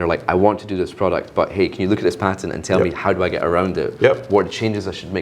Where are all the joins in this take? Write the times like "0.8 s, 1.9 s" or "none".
none